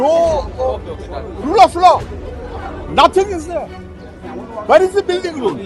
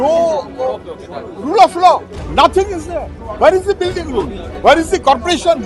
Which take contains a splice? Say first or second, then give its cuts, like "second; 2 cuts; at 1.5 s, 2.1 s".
second; 3 cuts; at 2.2 s, 3.2 s, 4.4 s